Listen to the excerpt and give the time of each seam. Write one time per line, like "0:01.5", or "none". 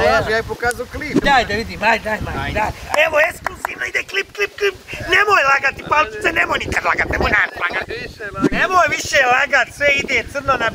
0:01.2